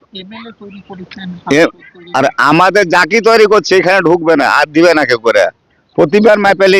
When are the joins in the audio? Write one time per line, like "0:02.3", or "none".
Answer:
none